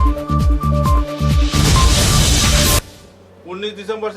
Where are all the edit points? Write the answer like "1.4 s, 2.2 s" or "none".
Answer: 2.9 s